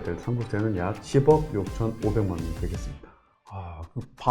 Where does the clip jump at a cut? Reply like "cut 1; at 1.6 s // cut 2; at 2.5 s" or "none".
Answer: cut 1; at 1.0 s